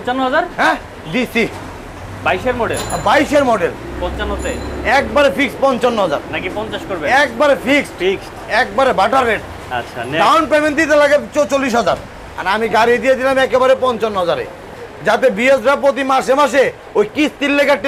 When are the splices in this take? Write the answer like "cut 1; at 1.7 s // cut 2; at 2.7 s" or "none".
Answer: none